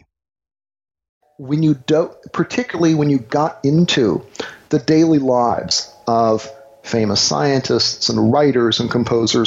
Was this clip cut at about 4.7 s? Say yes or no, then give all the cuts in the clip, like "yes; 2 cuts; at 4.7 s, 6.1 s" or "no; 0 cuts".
no; 1 cut; at 1.3 s